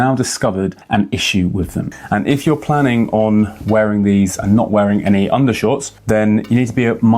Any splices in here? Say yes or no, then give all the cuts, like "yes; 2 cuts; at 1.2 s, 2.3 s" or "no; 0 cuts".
yes; 2 cuts; at 1.9 s, 6.0 s